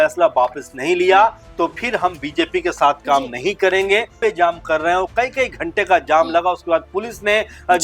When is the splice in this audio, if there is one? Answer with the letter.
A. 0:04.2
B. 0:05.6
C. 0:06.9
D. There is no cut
A